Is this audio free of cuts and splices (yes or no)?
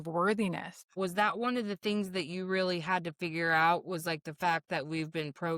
no